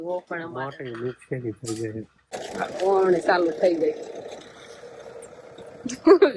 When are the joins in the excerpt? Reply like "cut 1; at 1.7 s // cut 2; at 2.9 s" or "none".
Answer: cut 1; at 2.2 s